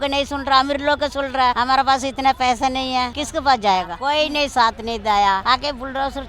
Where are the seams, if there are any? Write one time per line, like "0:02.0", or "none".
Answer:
0:01.6
0:03.2
0:03.9
0:05.4